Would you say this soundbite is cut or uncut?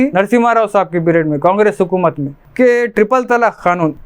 cut